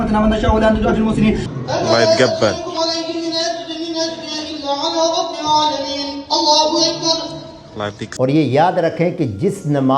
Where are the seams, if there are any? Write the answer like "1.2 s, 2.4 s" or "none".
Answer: 8.0 s